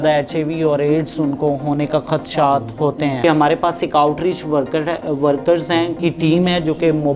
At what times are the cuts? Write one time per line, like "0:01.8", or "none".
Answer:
0:03.2
0:05.9